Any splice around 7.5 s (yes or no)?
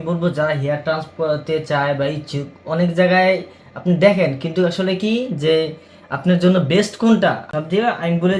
yes